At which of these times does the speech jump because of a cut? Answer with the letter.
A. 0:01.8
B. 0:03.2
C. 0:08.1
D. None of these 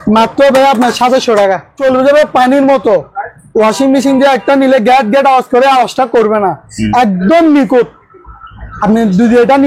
A